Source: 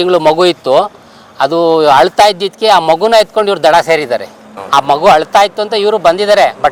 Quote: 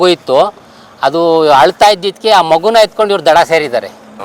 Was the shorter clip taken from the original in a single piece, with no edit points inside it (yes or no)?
yes